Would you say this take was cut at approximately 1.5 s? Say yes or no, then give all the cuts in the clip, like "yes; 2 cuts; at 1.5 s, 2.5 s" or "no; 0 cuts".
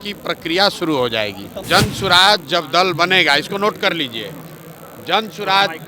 yes; 1 cut; at 1.5 s